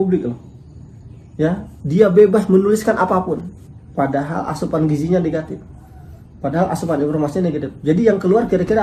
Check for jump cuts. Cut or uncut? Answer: uncut